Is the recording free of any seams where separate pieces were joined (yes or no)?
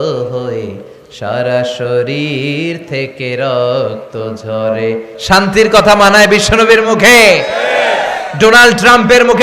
no